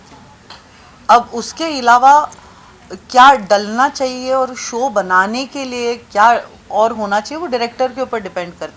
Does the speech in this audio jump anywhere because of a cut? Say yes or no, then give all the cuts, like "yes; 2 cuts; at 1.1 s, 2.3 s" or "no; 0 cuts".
no; 0 cuts